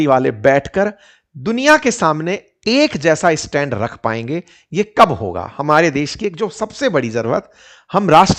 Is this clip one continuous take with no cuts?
yes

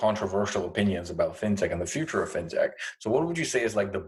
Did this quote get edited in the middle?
no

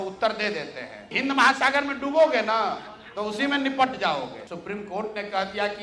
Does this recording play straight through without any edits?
no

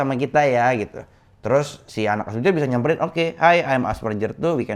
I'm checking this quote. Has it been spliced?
no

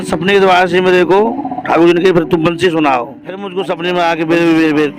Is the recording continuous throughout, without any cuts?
no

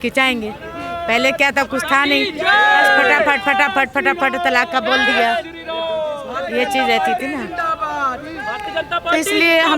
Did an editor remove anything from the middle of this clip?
no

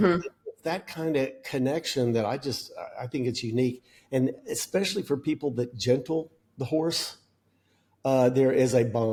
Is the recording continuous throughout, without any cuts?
yes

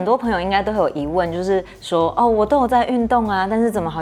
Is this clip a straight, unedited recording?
yes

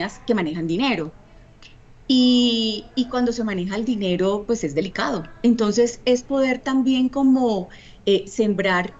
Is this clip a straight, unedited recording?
yes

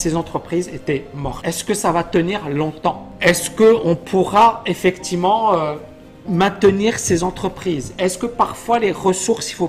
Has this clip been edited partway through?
yes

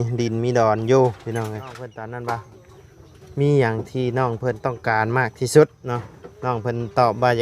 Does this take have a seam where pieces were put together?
yes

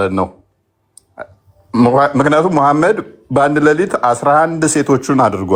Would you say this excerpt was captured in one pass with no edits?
yes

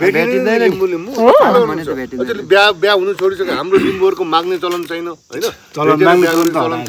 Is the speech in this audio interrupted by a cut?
no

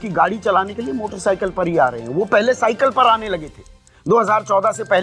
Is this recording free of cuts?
yes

